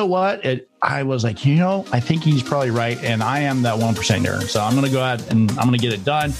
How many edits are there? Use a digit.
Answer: 0